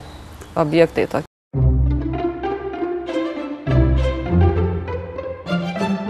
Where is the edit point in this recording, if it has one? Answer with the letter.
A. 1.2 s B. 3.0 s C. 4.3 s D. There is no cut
A